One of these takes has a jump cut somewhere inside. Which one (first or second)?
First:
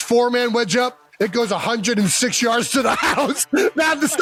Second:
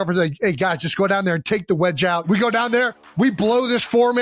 second